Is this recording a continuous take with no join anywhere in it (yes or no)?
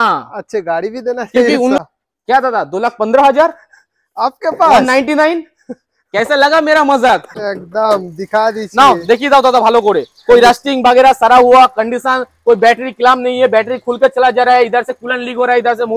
no